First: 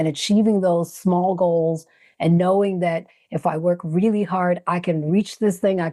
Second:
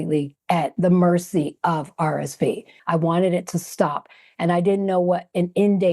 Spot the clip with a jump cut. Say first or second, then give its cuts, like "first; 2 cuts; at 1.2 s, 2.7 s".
second; 1 cut; at 2.7 s